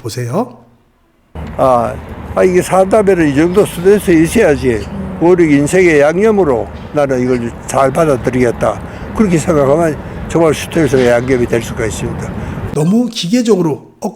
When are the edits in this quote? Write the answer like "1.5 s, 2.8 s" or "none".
12.6 s